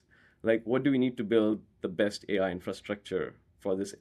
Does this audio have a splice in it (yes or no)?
no